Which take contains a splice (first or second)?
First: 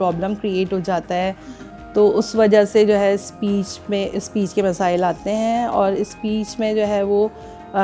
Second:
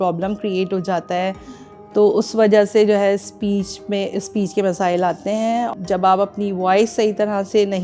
second